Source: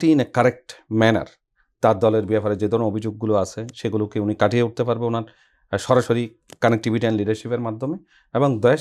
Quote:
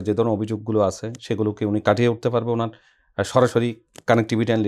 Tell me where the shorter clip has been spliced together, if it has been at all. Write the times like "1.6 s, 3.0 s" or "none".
none